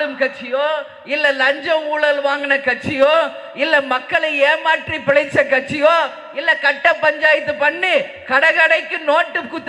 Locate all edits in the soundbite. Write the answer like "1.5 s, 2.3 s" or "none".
none